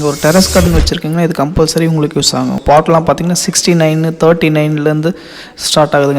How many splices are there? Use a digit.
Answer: 1